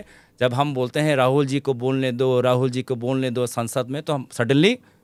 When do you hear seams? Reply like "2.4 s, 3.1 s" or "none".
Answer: none